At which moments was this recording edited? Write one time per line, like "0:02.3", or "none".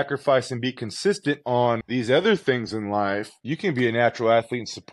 0:01.8
0:03.4